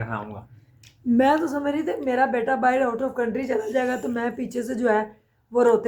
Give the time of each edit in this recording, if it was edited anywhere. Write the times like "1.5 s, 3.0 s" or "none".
none